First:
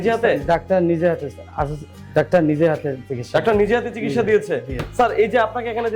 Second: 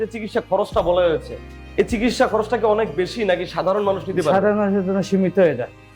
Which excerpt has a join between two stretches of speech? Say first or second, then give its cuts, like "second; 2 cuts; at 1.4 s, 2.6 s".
first; 1 cut; at 4.8 s